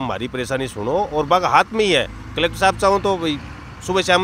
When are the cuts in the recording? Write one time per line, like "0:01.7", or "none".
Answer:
none